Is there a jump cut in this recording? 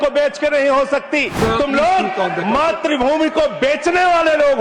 yes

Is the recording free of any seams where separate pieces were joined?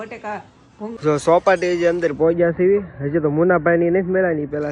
no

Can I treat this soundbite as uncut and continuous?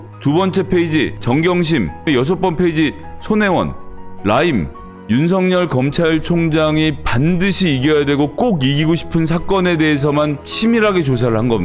no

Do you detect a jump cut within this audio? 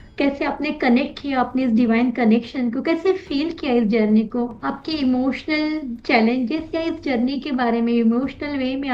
no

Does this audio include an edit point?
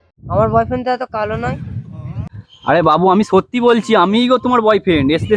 no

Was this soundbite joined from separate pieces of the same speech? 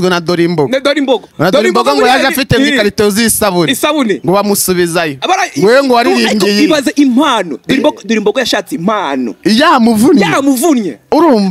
no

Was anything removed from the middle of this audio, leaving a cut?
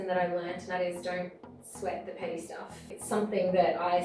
yes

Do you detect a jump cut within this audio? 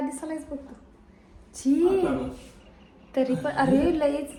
no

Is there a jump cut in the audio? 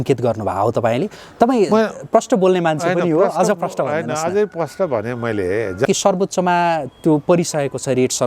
yes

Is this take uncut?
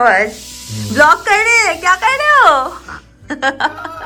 yes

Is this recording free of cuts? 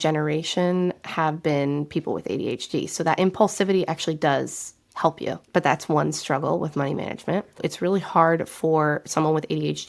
no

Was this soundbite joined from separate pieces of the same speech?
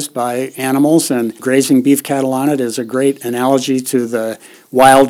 yes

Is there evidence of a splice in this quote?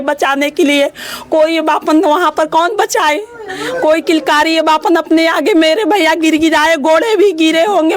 no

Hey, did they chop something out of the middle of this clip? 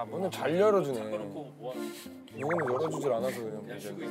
no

